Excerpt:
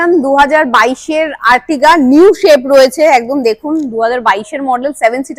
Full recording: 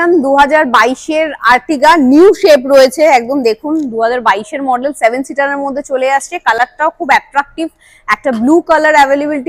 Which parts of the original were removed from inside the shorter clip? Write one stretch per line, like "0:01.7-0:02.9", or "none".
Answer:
none